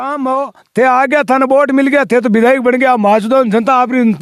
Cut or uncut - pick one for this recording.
uncut